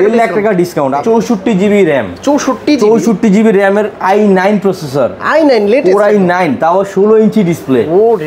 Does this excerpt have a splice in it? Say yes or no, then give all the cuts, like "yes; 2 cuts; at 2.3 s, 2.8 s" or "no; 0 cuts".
yes; 1 cut; at 1.0 s